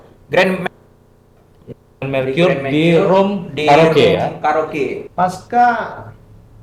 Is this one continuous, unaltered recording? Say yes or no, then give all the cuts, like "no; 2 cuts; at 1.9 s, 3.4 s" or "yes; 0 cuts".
no; 1 cut; at 5.0 s